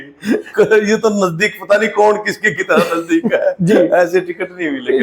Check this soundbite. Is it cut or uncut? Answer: uncut